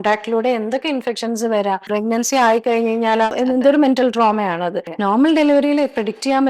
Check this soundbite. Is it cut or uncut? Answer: cut